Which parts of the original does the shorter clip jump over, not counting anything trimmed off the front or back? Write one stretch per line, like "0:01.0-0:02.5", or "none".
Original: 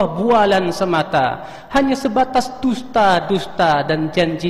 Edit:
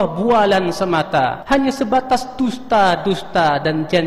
0:01.4-0:01.6